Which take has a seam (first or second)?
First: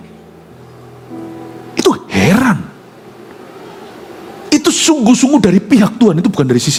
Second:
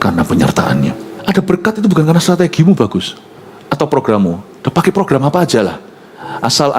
second